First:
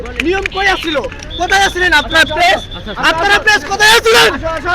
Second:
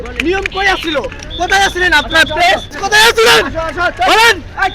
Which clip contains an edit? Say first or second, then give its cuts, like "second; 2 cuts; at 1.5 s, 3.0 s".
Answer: second; 1 cut; at 2.8 s